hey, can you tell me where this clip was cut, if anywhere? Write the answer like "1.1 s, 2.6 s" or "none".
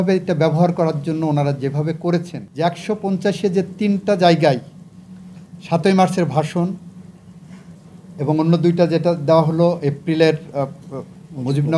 2.4 s

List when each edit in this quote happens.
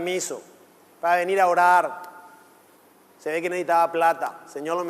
3.9 s

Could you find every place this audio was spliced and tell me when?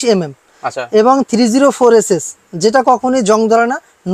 none

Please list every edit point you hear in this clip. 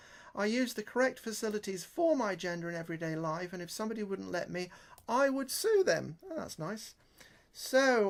none

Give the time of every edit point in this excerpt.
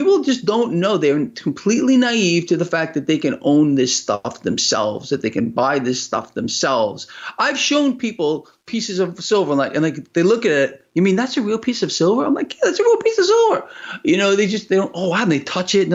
none

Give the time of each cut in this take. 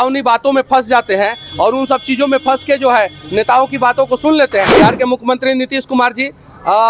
4.7 s

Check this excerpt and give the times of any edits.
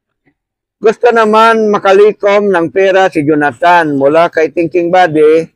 none

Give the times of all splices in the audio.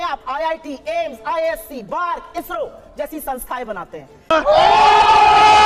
none

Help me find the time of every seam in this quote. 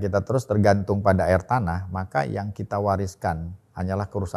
none

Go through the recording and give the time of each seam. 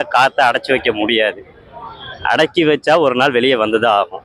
none

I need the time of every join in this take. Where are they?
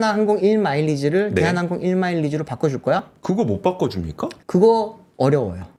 none

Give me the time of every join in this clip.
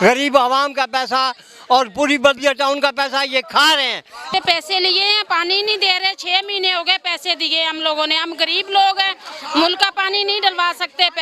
4.3 s

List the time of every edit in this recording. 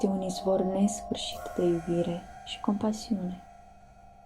3.4 s

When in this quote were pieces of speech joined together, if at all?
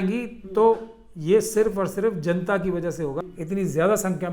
3.2 s

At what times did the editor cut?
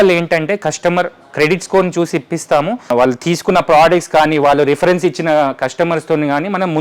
2.8 s

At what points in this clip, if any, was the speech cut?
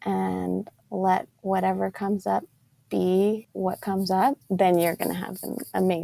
1.3 s, 3.5 s, 4.4 s

